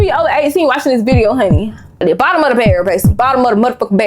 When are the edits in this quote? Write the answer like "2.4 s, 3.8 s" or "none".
2.0 s